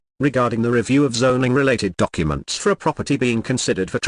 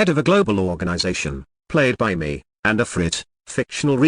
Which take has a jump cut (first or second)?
second